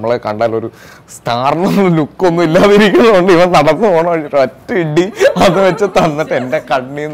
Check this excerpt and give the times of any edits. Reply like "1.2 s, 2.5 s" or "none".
none